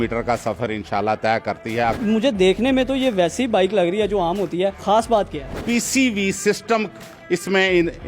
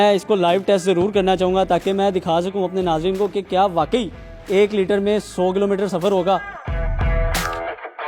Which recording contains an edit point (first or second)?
first